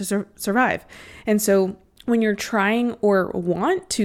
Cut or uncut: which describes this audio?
cut